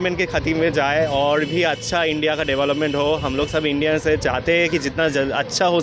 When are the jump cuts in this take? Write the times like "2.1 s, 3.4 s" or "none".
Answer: none